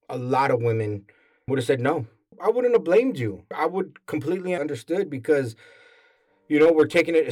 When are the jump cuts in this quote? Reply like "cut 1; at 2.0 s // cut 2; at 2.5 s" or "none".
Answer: cut 1; at 2.4 s // cut 2; at 3.5 s // cut 3; at 4.6 s